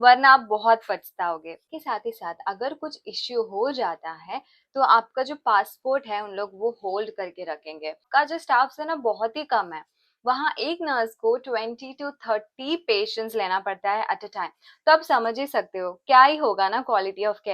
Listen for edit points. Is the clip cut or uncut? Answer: cut